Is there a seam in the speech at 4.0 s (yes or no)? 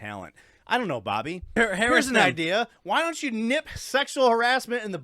no